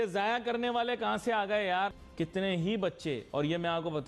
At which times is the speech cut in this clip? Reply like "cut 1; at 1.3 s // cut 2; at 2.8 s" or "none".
cut 1; at 2.0 s